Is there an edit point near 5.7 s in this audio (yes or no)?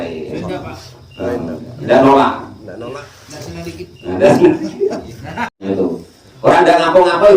yes